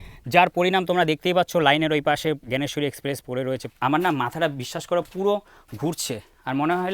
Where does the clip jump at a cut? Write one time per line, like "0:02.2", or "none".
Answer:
0:03.7